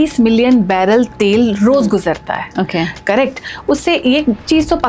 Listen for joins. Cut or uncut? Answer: cut